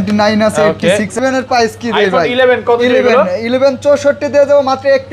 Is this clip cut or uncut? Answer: cut